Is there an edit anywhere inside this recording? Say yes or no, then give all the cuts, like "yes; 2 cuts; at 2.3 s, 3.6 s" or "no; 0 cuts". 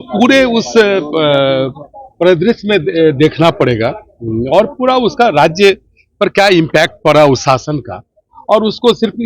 no; 0 cuts